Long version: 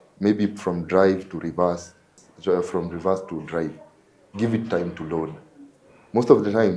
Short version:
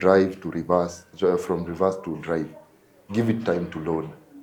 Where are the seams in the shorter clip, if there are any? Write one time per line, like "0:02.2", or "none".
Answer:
0:01.0